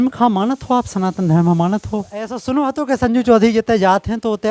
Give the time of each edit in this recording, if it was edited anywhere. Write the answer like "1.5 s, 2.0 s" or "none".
2.4 s